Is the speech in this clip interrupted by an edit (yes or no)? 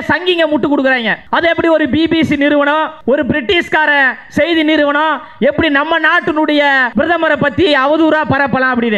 yes